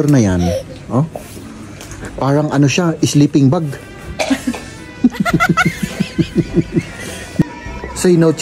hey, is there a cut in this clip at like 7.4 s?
yes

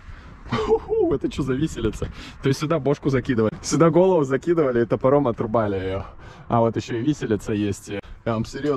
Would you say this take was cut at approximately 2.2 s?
no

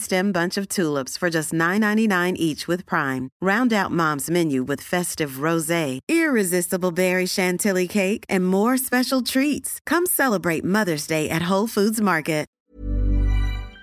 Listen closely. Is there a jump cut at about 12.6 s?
yes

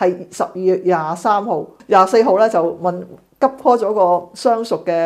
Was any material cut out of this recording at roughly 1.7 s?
yes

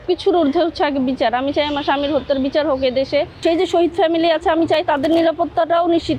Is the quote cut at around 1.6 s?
no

